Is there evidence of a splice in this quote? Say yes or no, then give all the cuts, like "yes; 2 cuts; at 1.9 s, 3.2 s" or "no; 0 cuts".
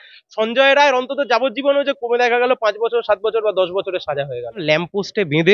yes; 1 cut; at 4.6 s